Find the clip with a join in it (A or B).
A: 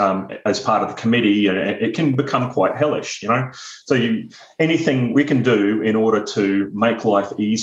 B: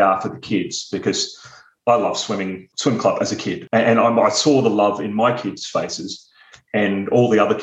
B